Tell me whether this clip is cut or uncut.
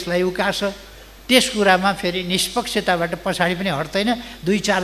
cut